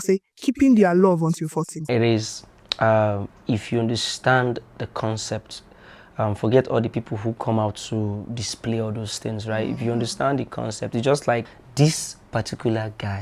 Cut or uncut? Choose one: cut